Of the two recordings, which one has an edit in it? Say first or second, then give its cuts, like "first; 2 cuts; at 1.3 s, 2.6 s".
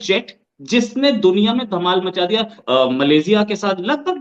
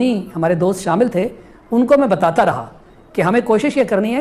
first; 1 cut; at 2.6 s